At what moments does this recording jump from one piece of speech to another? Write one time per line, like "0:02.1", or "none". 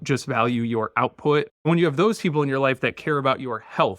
0:01.5